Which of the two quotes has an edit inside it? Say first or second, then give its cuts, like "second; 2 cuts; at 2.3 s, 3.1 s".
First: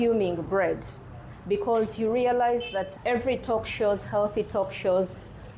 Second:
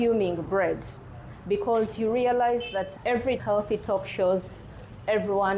second; 1 cut; at 3.4 s